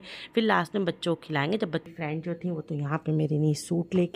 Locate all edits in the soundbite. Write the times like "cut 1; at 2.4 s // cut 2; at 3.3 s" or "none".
cut 1; at 1.9 s